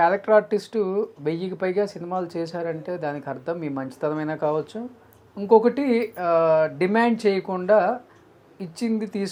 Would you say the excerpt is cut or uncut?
uncut